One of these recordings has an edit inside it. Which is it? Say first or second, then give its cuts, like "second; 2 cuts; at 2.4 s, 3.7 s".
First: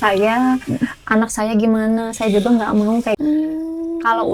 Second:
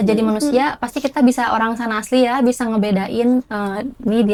first; 1 cut; at 3.2 s